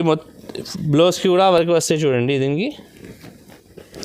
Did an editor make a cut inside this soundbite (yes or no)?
no